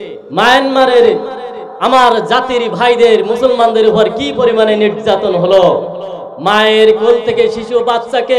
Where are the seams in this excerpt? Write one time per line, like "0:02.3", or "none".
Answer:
none